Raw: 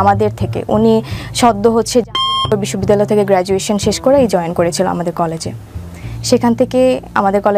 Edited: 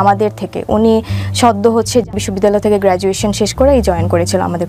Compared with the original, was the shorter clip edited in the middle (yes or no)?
yes